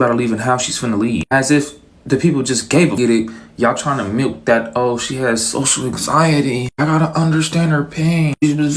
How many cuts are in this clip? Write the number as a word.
one